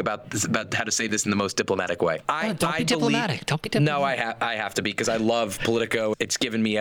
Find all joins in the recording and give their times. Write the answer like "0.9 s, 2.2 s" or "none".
none